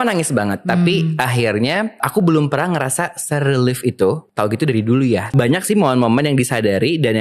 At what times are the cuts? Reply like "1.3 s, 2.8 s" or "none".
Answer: 2.0 s, 4.3 s, 5.3 s